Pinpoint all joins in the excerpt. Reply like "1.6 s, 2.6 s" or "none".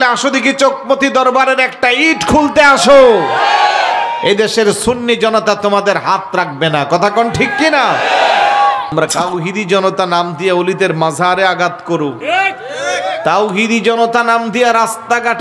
9.2 s